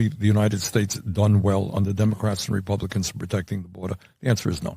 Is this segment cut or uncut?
cut